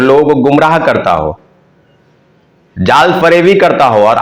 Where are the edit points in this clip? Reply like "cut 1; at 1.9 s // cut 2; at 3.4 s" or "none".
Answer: none

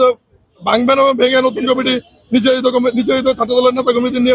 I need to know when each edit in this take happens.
none

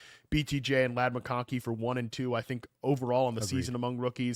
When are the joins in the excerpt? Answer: none

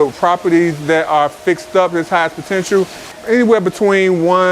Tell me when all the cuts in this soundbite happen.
cut 1; at 3.1 s

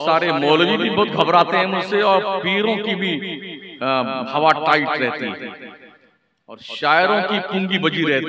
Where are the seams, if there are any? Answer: none

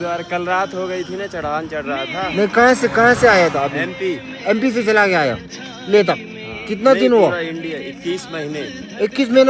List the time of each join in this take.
none

